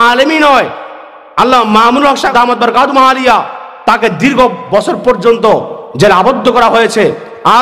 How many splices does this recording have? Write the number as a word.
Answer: one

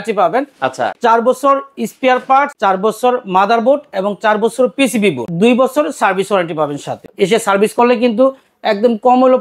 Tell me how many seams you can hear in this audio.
four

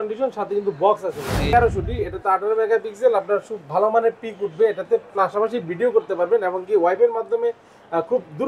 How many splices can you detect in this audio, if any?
one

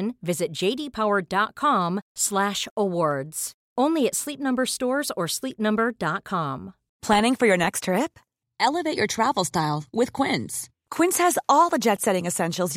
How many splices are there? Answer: one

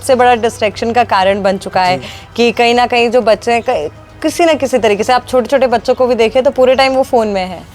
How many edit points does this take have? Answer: zero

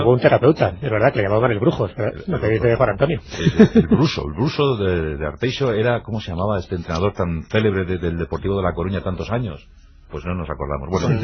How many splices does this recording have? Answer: zero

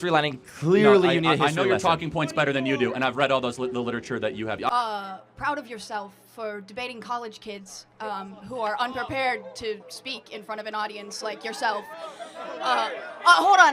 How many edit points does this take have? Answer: one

